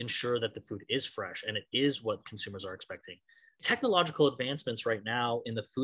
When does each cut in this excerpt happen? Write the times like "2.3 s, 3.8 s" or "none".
3.5 s